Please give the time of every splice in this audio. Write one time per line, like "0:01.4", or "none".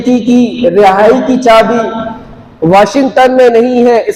none